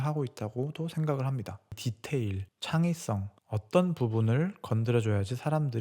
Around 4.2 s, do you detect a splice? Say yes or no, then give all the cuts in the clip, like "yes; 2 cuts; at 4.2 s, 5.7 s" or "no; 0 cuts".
no; 1 cut; at 1.9 s